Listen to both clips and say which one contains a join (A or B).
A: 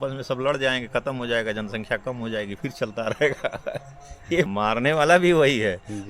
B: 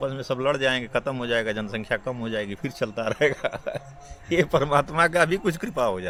A